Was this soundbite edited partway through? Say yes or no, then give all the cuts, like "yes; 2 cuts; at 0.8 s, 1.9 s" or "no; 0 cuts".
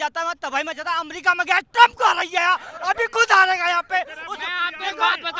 no; 0 cuts